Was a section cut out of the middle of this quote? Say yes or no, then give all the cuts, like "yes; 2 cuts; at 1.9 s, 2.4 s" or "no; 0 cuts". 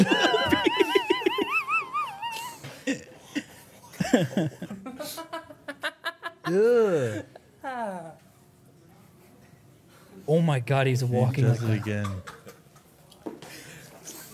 no; 0 cuts